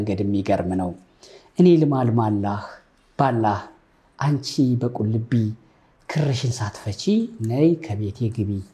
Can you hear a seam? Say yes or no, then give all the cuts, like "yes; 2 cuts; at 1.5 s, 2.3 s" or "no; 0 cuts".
no; 0 cuts